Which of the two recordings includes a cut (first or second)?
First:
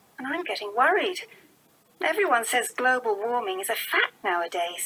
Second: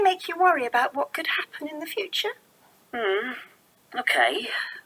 second